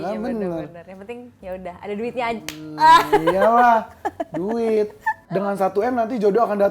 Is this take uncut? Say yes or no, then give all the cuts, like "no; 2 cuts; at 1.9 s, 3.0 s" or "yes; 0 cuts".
no; 1 cut; at 5.2 s